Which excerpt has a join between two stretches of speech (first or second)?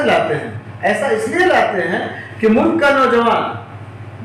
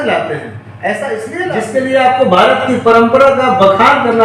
second